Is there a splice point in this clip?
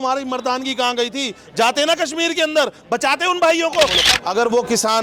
yes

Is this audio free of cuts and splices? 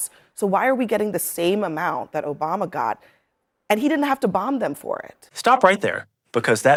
yes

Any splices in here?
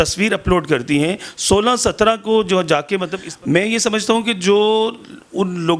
yes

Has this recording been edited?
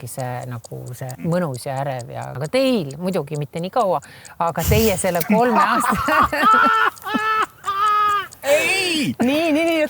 yes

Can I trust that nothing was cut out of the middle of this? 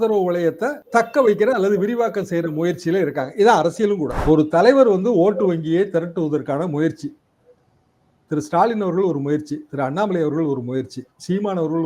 no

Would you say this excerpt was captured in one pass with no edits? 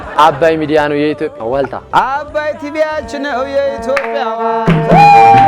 no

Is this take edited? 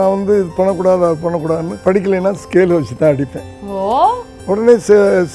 yes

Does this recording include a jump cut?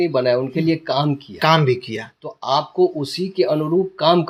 no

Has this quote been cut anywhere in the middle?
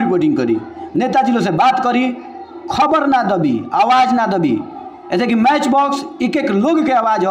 no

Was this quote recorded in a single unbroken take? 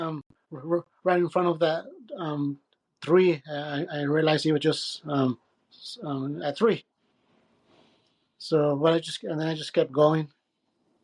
yes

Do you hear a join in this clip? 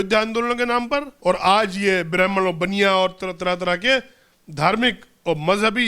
yes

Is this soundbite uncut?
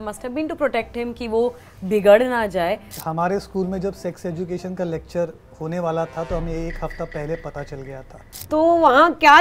no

